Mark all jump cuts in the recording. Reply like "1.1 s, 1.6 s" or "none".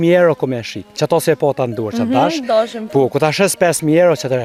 none